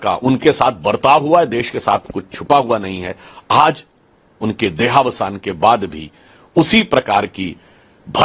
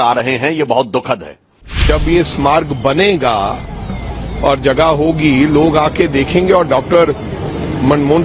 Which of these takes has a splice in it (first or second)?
second